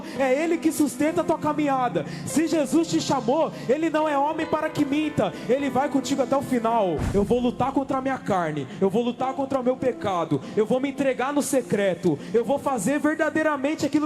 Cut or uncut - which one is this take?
cut